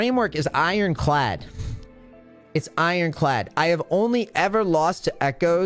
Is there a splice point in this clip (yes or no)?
no